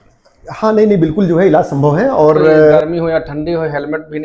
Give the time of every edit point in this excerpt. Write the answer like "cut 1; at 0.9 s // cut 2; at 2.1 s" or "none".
cut 1; at 2.8 s